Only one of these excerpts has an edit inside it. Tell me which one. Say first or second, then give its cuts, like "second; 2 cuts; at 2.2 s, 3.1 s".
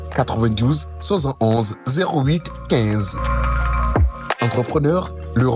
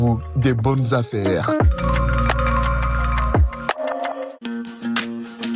second; 1 cut; at 4.4 s